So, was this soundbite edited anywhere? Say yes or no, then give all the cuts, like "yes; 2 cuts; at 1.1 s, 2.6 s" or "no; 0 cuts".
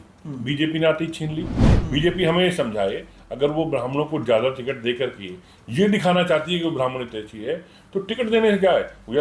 yes; 1 cut; at 1.7 s